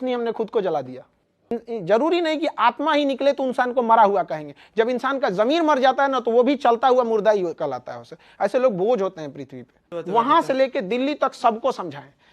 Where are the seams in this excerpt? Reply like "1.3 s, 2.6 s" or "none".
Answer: 1.5 s, 9.9 s

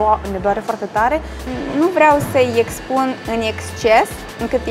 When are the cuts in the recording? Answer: 1.5 s

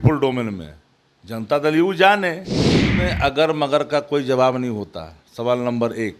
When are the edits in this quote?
2.8 s

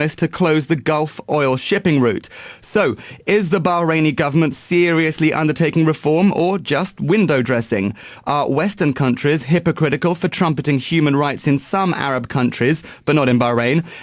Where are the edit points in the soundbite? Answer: 5.3 s

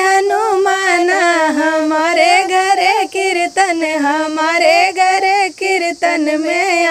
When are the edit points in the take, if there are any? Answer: none

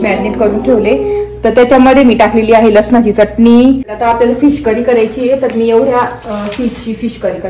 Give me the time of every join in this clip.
3.9 s

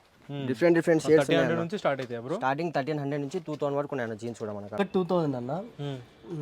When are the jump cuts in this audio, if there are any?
4.7 s

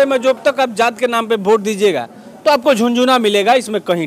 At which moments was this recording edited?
none

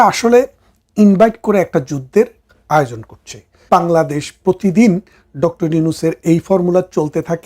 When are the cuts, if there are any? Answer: 3.7 s

